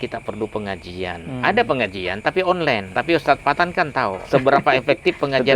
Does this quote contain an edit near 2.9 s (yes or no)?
yes